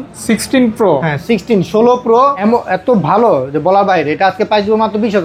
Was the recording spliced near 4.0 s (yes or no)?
no